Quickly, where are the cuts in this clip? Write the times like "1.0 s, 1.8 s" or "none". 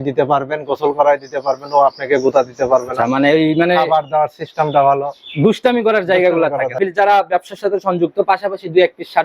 6.8 s